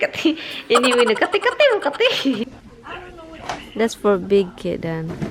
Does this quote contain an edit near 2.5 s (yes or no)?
yes